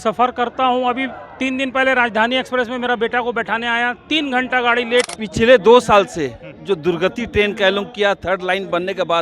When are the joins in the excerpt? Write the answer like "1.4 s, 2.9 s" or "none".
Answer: 5.2 s